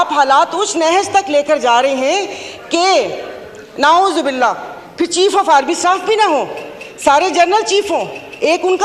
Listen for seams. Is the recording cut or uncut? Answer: uncut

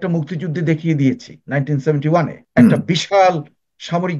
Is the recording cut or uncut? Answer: cut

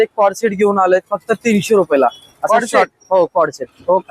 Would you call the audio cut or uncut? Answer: uncut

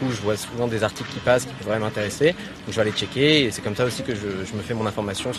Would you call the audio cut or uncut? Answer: uncut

